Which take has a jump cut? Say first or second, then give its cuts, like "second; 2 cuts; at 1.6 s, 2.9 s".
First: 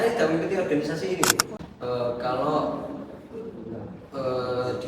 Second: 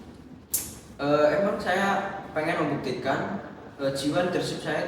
first; 1 cut; at 1.5 s